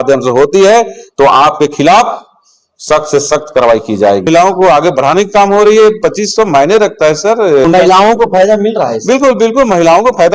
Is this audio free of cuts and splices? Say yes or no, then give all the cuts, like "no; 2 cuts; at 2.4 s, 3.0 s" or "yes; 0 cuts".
no; 2 cuts; at 4.2 s, 7.6 s